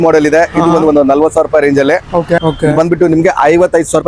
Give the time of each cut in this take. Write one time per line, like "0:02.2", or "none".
0:02.4